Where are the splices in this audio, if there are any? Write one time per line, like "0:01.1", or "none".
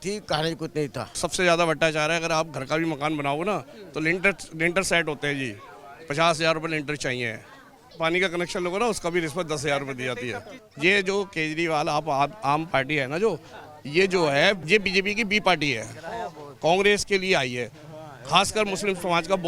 0:01.0
0:07.9
0:10.6
0:14.6